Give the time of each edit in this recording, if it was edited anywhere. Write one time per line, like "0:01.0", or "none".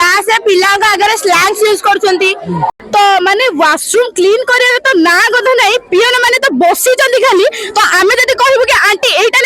0:02.7